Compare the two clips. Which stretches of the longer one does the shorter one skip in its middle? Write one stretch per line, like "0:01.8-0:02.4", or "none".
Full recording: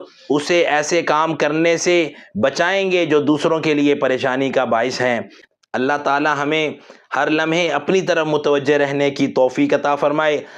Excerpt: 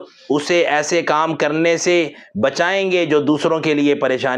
none